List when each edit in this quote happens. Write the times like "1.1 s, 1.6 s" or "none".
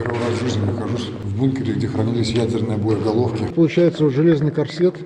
1.2 s, 3.5 s